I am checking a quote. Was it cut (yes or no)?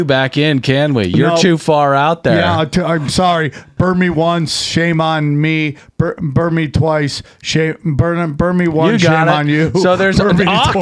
no